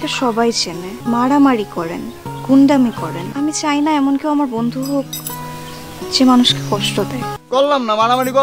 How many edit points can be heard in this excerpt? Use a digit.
3